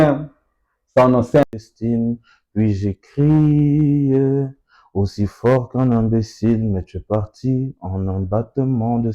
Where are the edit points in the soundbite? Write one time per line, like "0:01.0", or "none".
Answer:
0:01.4